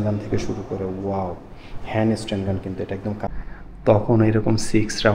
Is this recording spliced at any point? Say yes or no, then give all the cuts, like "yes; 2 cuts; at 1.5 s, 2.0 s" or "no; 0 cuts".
yes; 1 cut; at 3.3 s